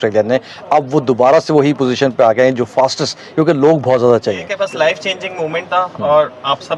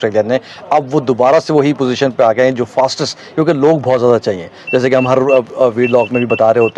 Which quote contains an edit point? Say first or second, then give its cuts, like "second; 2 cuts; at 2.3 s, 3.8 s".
first; 1 cut; at 4.5 s